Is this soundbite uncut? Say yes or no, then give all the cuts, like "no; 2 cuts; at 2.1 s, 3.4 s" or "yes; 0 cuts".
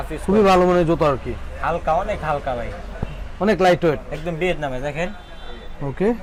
yes; 0 cuts